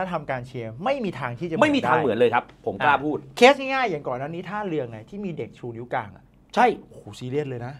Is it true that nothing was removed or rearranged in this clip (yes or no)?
yes